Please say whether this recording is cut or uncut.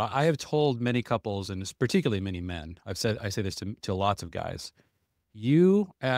uncut